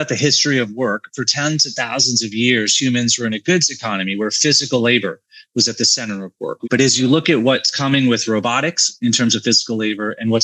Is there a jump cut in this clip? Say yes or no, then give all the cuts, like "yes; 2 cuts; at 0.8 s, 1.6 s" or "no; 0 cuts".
no; 0 cuts